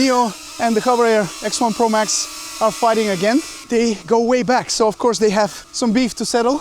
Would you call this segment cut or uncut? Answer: cut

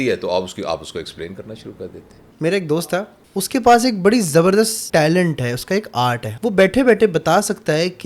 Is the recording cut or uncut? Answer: cut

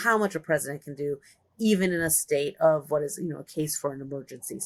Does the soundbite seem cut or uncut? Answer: uncut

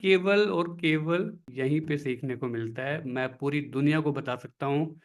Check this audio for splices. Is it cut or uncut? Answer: cut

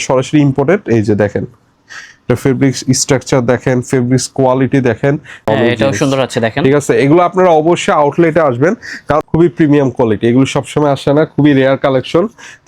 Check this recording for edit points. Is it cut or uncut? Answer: cut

